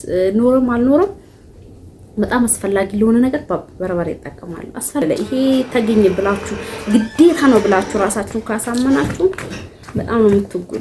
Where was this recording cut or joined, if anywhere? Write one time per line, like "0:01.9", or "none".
0:05.0